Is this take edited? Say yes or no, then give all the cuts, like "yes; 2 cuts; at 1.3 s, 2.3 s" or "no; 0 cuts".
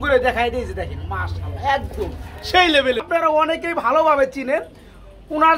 yes; 1 cut; at 3.0 s